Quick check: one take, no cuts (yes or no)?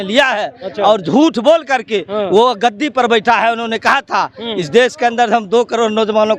yes